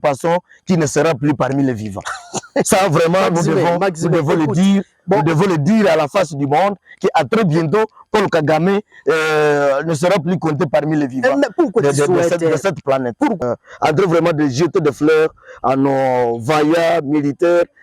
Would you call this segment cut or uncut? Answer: cut